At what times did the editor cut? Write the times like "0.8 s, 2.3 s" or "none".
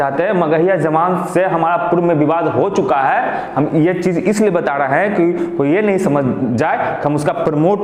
none